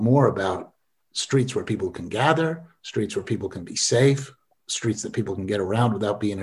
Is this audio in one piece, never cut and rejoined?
yes; 0 cuts

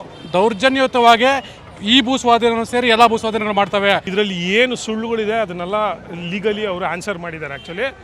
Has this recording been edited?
yes; 1 cut; at 4.1 s

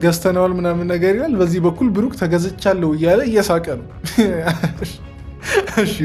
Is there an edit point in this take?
no; 0 cuts

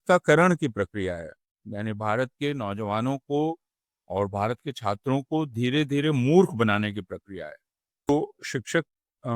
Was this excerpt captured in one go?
no; 1 cut; at 8.1 s

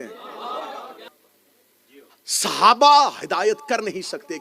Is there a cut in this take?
yes; 1 cut; at 1.1 s

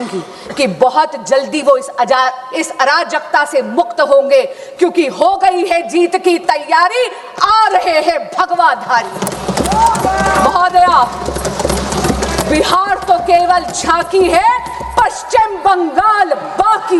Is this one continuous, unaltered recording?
yes; 0 cuts

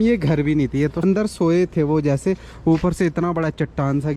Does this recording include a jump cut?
yes; 1 cut; at 1.0 s

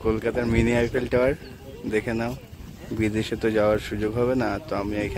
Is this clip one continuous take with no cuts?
yes; 0 cuts

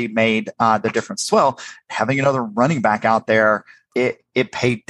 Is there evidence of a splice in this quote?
yes; 1 cut; at 3.7 s

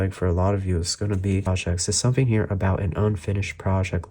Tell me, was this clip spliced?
yes; 1 cut; at 1.5 s

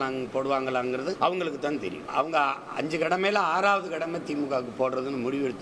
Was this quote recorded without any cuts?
no; 2 cuts; at 1.2 s, 2.0 s

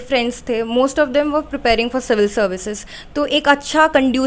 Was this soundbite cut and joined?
no; 0 cuts

